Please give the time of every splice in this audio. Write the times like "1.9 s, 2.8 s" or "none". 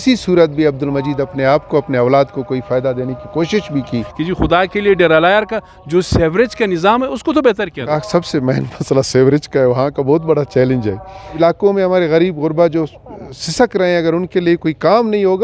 4.1 s, 7.9 s, 11.4 s